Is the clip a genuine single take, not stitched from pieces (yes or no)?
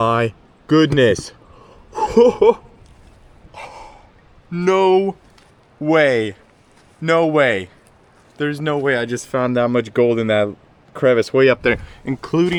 yes